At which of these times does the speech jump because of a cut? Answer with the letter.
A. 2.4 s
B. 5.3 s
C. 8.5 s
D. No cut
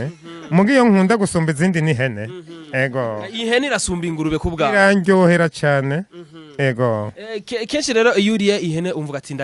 D